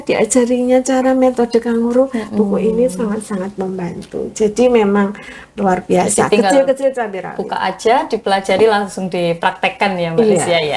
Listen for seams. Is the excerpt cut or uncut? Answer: uncut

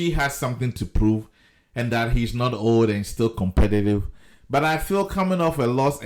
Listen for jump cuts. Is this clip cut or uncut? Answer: uncut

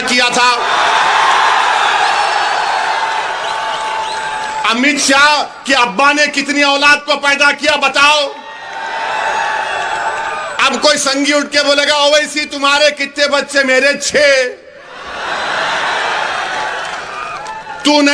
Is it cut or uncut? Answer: uncut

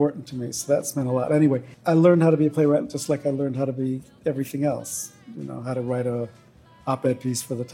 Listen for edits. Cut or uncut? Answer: cut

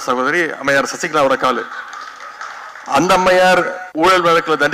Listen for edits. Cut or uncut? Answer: cut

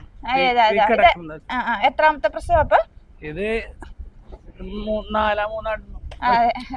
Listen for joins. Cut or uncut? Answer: uncut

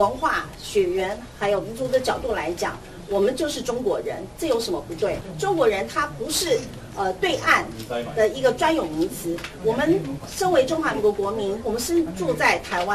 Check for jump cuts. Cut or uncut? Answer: cut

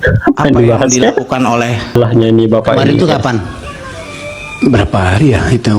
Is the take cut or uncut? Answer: cut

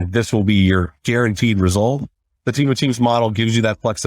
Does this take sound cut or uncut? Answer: cut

